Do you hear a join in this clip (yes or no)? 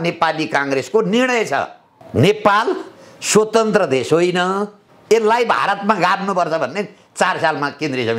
no